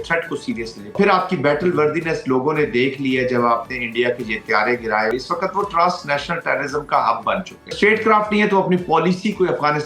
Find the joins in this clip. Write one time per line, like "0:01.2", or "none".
0:00.9
0:05.1
0:07.8

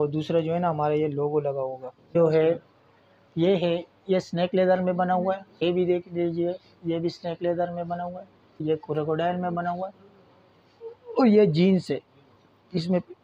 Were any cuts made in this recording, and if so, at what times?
0:02.2
0:05.6
0:08.6

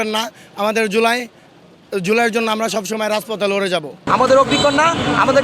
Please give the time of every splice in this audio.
0:04.0

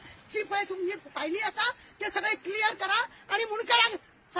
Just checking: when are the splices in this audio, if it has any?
none

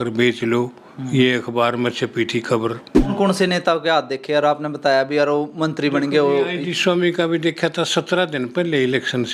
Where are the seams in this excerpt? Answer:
0:03.1

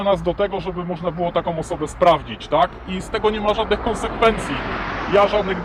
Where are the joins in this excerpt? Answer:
none

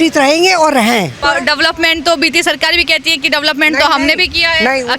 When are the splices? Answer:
0:01.2

